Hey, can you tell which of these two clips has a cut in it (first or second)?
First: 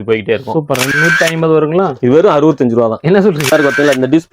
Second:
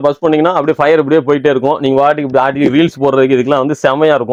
first